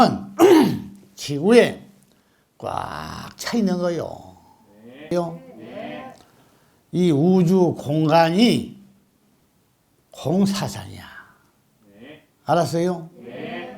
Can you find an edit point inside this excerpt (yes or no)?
yes